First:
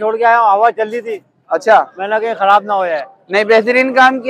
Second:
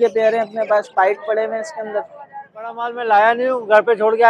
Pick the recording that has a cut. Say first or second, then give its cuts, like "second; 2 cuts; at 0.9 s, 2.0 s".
second; 1 cut; at 2.8 s